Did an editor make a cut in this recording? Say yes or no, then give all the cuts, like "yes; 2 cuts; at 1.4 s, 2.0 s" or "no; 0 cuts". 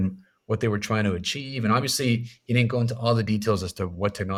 no; 0 cuts